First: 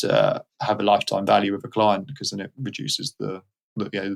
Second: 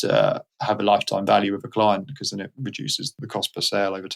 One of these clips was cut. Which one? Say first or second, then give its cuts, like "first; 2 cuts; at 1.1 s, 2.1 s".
second; 1 cut; at 3.1 s